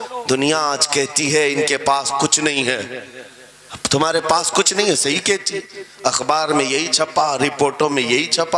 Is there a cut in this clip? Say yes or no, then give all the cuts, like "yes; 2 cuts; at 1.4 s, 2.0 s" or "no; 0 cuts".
no; 0 cuts